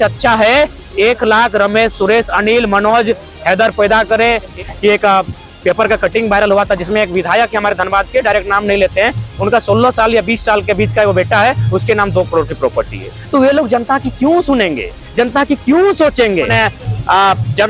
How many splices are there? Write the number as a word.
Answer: two